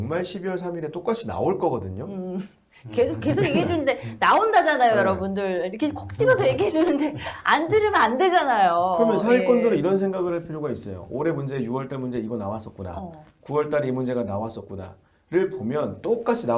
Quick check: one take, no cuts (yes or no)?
yes